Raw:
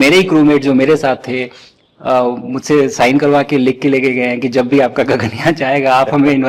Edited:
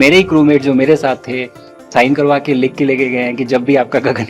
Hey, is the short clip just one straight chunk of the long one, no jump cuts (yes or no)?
no